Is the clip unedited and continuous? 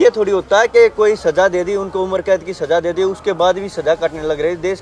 yes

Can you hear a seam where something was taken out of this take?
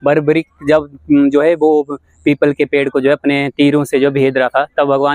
no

